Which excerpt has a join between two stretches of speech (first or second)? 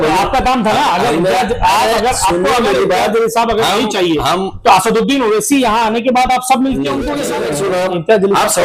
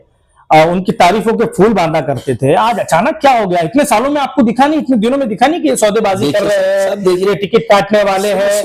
first